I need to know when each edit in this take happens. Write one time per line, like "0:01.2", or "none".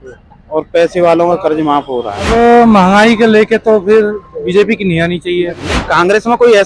0:02.3
0:05.8